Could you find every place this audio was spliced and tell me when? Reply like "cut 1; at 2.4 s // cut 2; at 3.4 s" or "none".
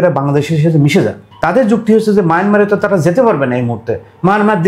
cut 1; at 1.3 s